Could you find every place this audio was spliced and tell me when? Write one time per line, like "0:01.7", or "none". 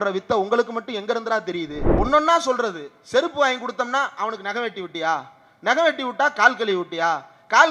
0:01.8